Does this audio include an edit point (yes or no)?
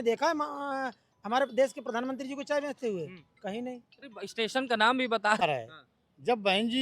yes